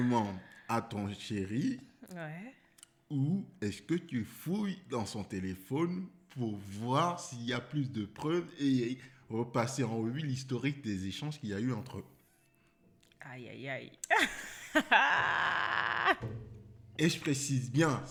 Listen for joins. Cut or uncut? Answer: uncut